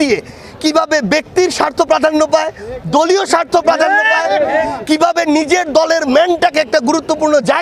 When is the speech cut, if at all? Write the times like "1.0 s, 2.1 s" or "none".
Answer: none